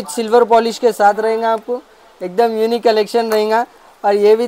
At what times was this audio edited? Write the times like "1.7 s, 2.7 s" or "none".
none